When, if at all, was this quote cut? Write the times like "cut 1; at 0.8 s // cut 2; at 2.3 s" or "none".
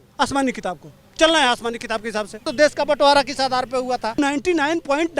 cut 1; at 2.4 s // cut 2; at 4.1 s